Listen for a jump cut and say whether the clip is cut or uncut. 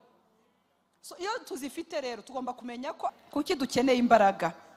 cut